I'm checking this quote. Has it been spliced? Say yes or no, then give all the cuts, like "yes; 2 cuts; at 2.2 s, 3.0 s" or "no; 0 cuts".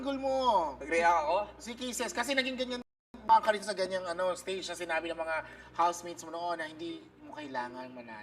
no; 0 cuts